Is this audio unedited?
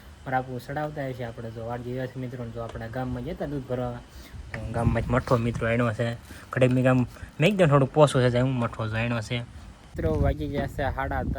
no; 1 cut; at 9.9 s

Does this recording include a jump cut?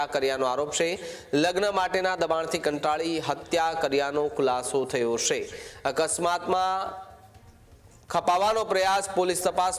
no; 0 cuts

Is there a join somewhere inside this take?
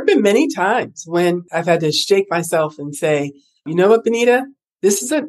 yes; 1 cut; at 1.5 s

